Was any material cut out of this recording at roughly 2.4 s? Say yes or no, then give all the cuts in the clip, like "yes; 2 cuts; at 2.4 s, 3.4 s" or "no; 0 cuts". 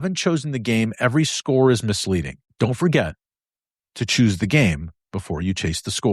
yes; 1 cut; at 2.4 s